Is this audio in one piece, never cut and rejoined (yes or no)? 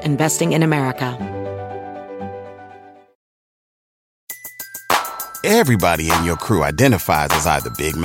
no